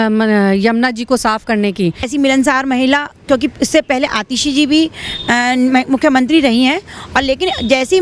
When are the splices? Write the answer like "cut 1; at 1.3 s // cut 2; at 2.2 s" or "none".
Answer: cut 1; at 2.0 s